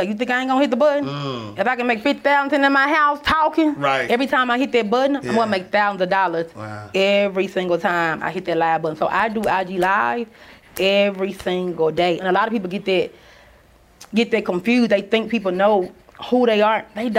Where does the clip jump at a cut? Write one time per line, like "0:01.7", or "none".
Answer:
0:04.0
0:12.2